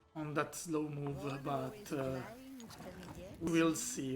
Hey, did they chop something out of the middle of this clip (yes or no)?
yes